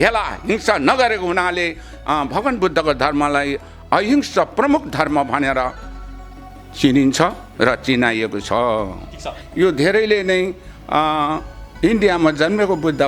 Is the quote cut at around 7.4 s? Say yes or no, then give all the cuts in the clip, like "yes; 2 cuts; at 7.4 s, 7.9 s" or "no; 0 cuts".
no; 1 cut; at 9.4 s